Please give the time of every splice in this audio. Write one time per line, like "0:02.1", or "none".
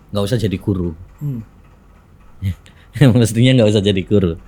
none